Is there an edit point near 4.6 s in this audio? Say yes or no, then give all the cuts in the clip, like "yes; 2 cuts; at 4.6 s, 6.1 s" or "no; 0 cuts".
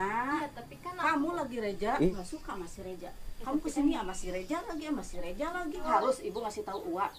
no; 2 cuts; at 2.2 s, 5.9 s